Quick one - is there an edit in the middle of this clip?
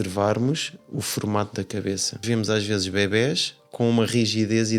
yes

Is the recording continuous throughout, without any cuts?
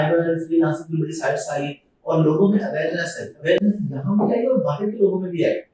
yes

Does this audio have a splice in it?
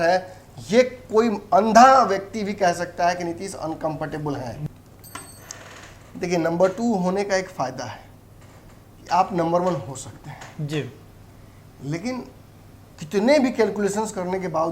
yes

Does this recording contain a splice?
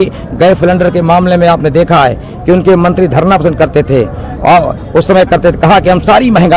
no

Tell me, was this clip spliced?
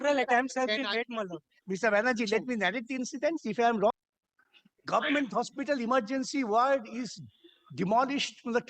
yes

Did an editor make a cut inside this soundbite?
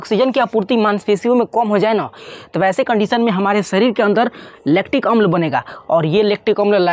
no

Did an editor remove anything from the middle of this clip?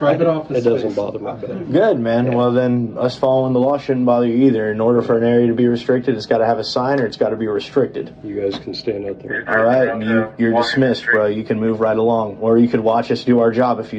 no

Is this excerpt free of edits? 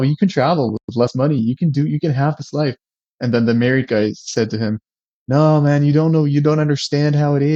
yes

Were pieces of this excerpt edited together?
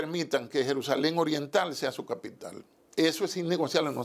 no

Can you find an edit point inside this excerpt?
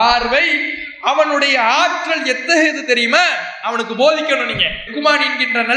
no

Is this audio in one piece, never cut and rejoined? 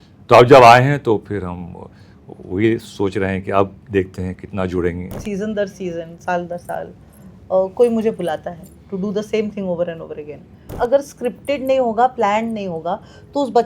no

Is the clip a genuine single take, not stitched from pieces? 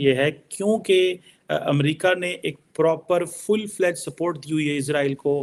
yes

